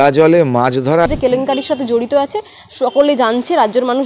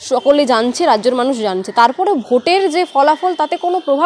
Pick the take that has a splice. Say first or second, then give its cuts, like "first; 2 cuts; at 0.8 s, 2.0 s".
first; 1 cut; at 1.1 s